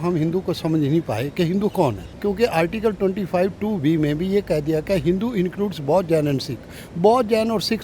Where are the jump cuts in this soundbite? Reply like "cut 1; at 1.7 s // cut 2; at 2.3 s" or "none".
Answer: cut 1; at 2.1 s